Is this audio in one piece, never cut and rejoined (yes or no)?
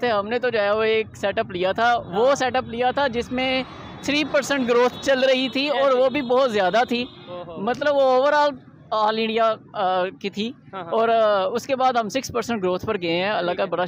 yes